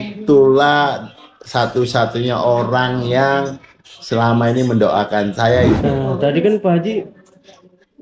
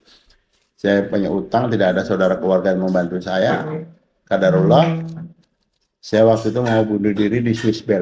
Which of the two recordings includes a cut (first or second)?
first